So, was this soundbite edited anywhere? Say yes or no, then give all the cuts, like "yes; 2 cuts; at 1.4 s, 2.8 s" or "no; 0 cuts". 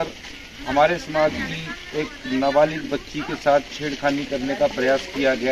no; 0 cuts